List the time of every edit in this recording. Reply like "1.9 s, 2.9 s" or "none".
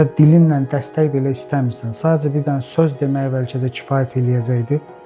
none